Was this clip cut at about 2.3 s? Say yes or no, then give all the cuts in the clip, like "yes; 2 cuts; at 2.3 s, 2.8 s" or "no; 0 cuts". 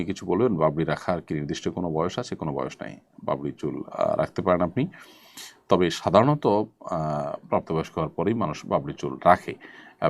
no; 0 cuts